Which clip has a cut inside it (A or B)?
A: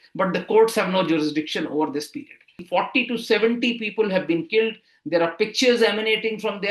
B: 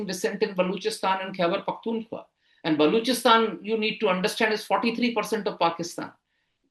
A